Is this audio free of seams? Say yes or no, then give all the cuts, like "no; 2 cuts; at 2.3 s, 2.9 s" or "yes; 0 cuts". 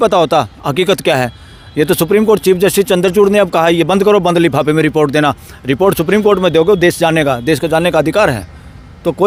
yes; 0 cuts